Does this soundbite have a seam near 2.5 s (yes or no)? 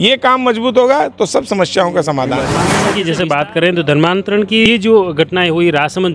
yes